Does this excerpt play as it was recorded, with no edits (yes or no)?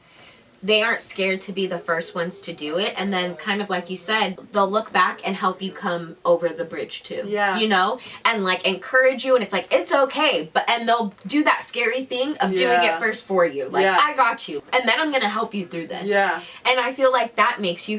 no